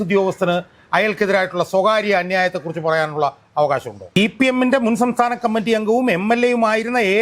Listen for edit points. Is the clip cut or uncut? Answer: cut